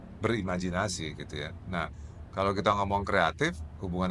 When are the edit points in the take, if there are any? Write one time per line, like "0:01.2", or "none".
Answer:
none